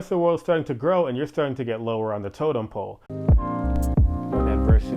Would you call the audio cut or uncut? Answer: cut